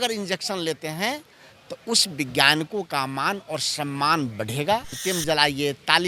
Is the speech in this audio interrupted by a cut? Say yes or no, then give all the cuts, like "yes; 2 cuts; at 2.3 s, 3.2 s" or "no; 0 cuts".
yes; 1 cut; at 5.0 s